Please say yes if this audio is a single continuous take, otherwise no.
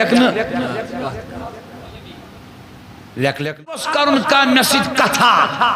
no